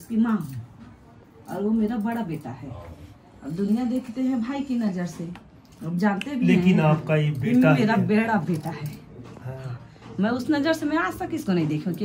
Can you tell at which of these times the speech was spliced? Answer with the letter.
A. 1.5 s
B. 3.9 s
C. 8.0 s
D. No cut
D